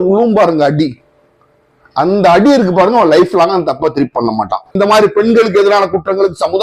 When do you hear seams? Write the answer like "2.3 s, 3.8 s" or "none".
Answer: 4.7 s